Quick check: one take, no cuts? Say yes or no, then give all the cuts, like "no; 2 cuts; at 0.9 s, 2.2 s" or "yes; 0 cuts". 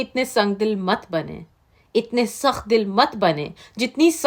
yes; 0 cuts